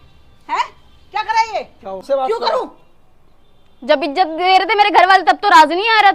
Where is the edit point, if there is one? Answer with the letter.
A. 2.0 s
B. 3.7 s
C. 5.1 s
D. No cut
A